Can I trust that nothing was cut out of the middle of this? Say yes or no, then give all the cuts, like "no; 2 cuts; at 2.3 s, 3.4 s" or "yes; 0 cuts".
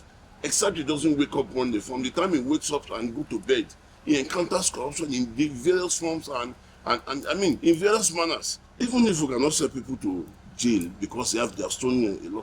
no; 1 cut; at 8.8 s